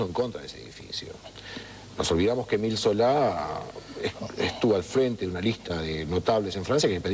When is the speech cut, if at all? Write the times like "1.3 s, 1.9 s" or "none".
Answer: 5.6 s